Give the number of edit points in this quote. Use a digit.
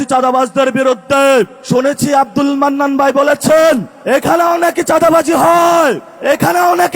3